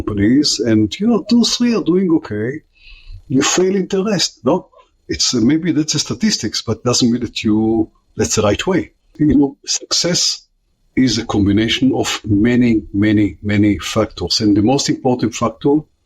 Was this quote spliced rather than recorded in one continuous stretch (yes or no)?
yes